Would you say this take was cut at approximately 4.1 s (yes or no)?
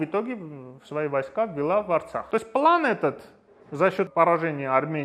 yes